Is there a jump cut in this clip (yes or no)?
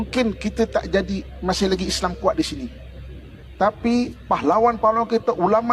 no